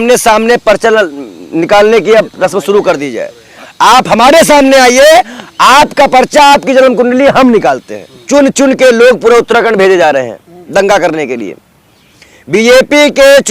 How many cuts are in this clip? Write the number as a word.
one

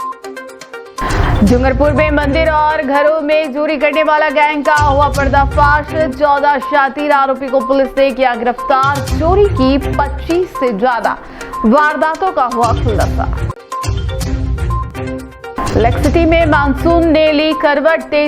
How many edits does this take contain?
one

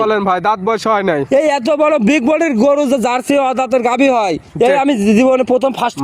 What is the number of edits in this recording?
zero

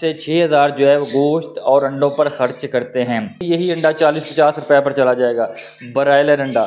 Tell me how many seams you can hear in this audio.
one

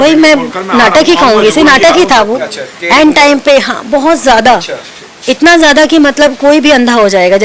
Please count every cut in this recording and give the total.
zero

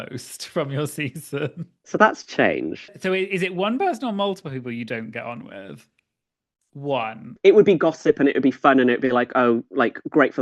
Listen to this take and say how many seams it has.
three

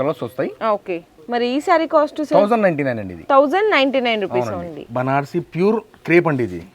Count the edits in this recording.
two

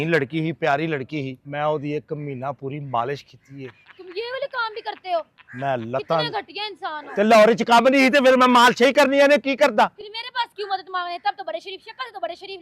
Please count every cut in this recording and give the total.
one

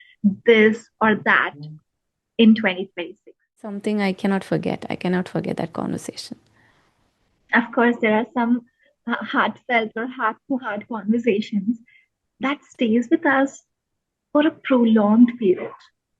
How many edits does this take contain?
one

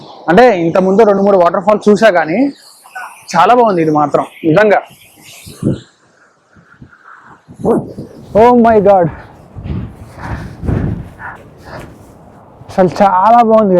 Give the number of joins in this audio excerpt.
two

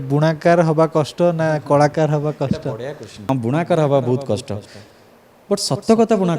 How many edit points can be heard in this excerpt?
one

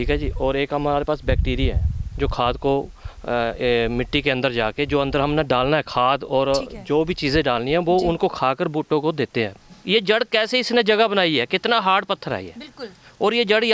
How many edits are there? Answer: one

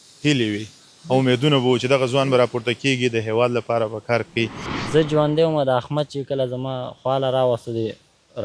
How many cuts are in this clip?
one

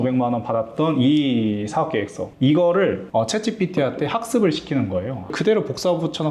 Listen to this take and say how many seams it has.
one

